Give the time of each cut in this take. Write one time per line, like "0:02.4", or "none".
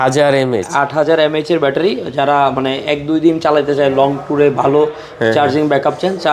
none